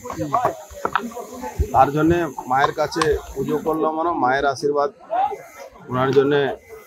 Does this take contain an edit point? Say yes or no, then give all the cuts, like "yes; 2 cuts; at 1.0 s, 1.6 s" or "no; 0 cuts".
no; 0 cuts